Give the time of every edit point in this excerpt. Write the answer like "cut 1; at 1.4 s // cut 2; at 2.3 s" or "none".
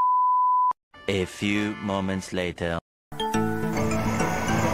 cut 1; at 0.9 s // cut 2; at 3.1 s